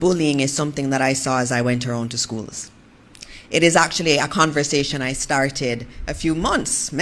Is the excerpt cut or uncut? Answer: uncut